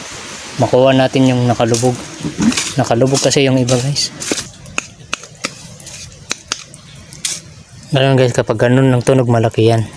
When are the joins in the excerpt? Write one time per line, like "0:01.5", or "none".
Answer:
0:04.5